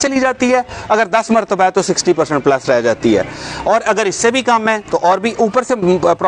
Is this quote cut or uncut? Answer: uncut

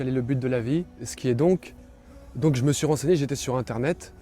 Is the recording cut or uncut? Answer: cut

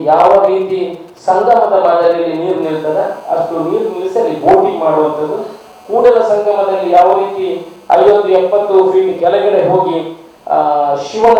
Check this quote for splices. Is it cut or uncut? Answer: uncut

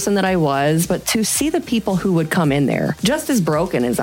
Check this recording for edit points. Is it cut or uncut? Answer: cut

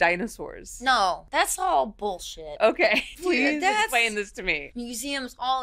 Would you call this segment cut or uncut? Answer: cut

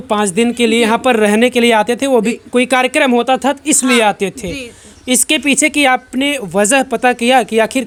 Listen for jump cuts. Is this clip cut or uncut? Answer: uncut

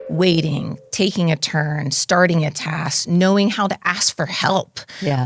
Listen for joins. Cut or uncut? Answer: uncut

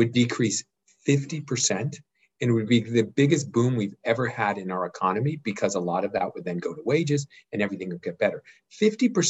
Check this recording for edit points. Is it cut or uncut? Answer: uncut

